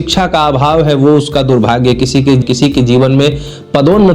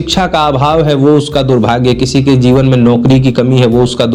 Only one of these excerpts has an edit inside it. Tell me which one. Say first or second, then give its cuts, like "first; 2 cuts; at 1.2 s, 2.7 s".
first; 1 cut; at 2.4 s